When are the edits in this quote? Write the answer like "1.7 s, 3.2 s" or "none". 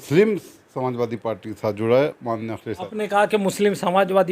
2.7 s